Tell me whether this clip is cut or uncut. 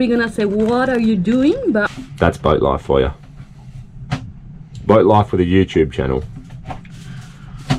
cut